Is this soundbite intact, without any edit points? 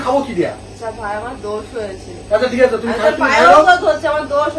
yes; 0 cuts

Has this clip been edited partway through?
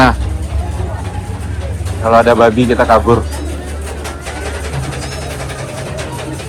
no; 0 cuts

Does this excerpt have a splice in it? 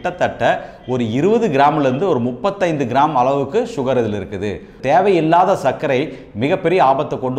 yes; 1 cut; at 4.7 s

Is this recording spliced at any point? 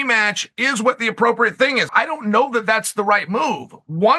yes; 1 cut; at 1.9 s

